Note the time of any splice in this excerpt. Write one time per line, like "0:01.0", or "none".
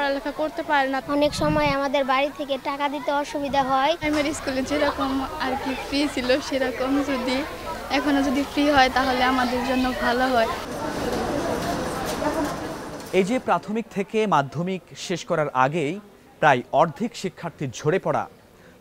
none

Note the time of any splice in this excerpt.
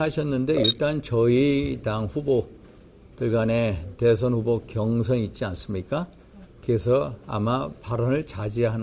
none

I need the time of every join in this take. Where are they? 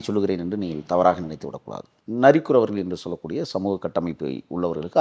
none

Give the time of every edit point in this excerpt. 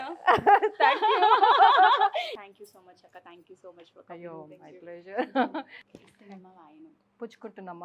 0:02.5
0:05.9

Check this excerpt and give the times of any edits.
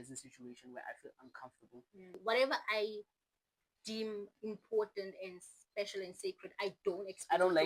0:02.2

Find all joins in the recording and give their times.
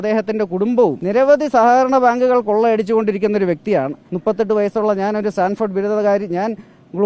0:01.0
0:04.0

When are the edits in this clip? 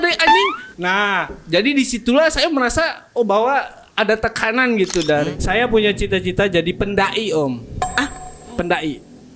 0:05.3

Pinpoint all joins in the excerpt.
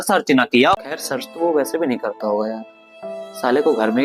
0:00.9

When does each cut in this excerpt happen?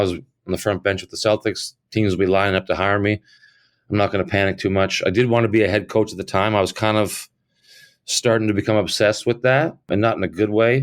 0:09.9

